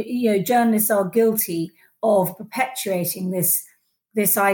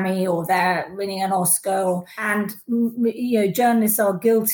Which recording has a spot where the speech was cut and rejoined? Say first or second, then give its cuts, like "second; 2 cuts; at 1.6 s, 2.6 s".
second; 1 cut; at 2.1 s